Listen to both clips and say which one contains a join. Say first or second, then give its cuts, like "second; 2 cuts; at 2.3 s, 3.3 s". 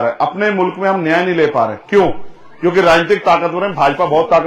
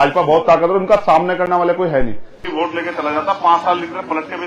second; 1 cut; at 2.4 s